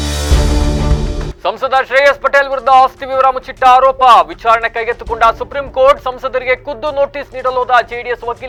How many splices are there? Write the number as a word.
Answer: zero